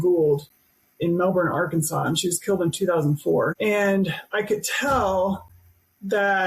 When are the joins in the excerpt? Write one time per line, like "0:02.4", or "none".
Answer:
0:03.5